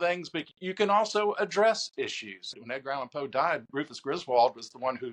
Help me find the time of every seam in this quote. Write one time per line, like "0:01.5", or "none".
0:02.6